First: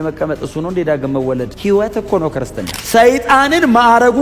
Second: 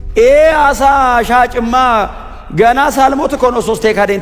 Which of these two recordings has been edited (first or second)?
first